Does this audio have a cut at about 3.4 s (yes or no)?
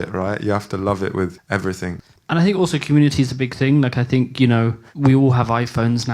no